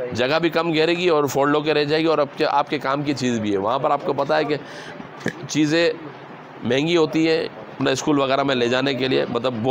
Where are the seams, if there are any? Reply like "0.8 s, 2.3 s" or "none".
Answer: 7.8 s